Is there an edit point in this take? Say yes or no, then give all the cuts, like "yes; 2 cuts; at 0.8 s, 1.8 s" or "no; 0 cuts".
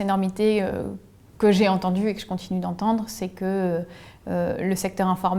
no; 0 cuts